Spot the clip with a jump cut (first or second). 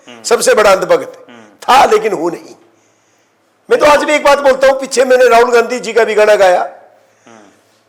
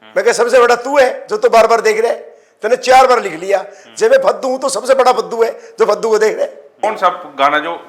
second